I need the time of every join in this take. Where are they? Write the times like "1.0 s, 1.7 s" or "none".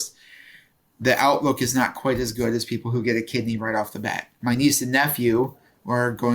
4.3 s